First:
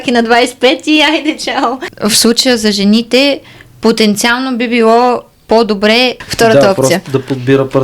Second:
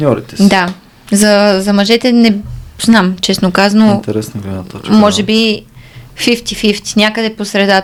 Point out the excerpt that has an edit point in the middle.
first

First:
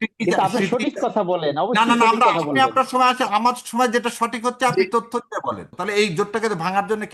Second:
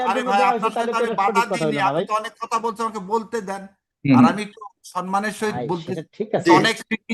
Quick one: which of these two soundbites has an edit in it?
first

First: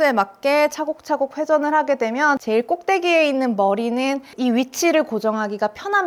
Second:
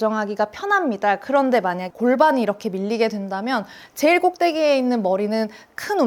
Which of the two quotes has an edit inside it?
second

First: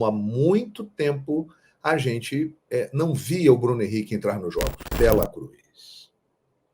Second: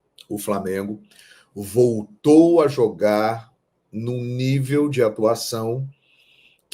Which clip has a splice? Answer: first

